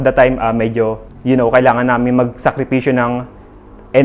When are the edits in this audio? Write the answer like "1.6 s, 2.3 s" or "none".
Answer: 1.1 s